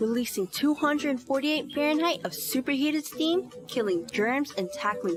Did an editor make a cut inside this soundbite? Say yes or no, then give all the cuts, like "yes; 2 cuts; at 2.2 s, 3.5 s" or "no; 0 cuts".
no; 0 cuts